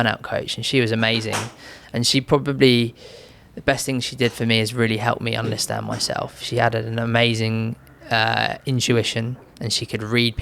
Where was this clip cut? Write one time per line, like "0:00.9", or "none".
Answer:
none